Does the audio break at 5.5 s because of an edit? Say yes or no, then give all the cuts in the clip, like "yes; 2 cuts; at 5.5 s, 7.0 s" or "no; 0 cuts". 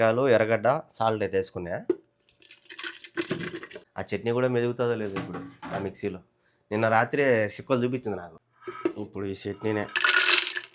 no; 2 cuts; at 3.8 s, 8.4 s